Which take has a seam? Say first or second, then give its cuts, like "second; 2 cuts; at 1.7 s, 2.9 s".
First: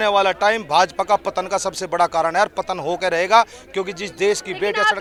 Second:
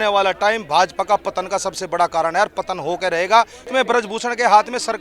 second; 1 cut; at 3.7 s